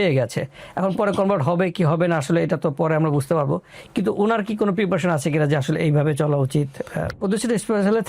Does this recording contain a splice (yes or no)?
yes